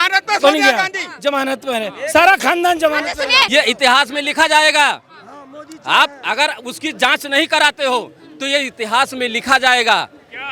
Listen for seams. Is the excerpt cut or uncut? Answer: cut